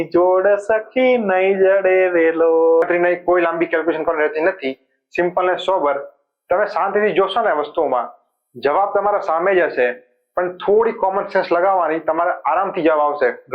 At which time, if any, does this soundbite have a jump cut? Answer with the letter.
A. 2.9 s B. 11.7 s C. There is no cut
A